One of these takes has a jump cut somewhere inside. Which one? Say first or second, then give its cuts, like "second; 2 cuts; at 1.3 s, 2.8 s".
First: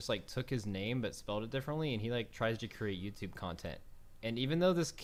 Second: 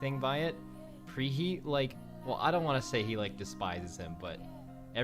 second; 1 cut; at 2.1 s